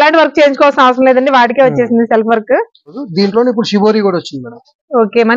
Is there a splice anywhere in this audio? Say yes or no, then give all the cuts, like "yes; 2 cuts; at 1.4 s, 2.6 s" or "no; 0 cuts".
yes; 1 cut; at 3.0 s